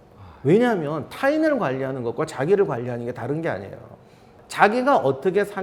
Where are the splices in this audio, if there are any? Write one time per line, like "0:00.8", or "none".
none